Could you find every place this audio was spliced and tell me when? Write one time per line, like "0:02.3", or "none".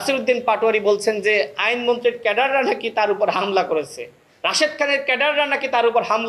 none